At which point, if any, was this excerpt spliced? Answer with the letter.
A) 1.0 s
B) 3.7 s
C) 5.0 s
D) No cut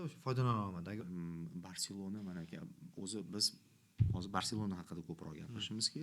A